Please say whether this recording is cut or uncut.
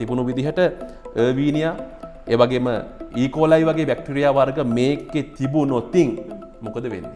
uncut